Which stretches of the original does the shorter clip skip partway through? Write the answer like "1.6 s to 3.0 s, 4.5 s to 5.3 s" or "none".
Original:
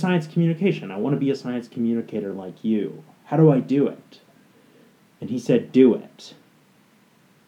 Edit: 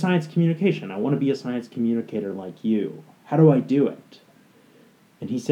none